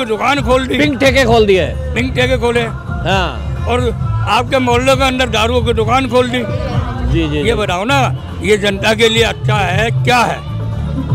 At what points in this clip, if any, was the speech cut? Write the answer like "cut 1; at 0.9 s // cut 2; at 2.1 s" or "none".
none